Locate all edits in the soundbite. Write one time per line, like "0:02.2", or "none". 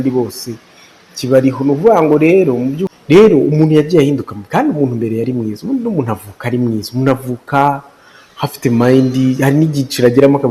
0:02.9